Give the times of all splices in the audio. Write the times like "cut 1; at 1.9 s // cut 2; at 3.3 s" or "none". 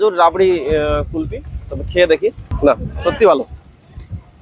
cut 1; at 2.5 s